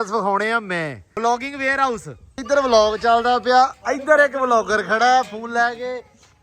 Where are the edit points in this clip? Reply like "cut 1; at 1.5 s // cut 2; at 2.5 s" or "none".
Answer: cut 1; at 1.0 s // cut 2; at 2.4 s